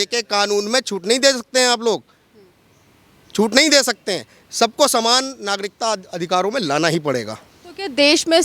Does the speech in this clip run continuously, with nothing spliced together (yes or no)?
yes